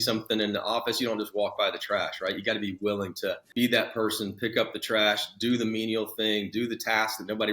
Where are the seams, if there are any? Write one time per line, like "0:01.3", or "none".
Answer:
0:03.4

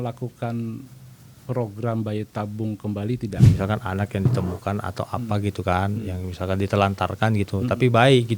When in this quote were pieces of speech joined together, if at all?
0:03.5

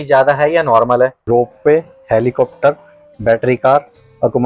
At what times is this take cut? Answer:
0:01.2

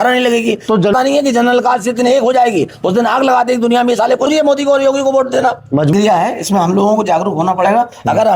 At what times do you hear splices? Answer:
0:00.9
0:04.3
0:05.9

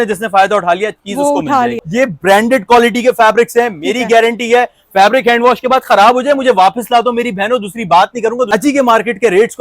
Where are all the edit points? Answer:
0:01.8
0:08.5

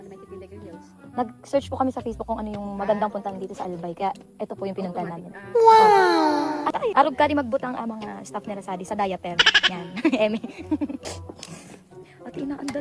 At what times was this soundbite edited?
0:06.7
0:11.0

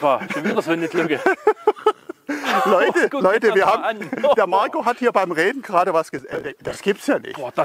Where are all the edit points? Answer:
0:06.4

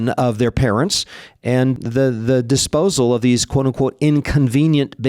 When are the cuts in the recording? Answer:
0:01.7

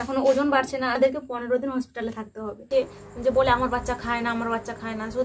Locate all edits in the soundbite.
0:01.0
0:02.7

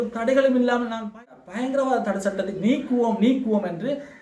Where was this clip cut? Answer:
0:01.1

